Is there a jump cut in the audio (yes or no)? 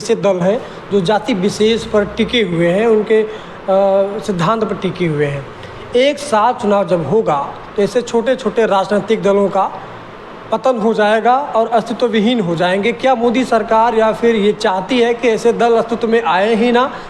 no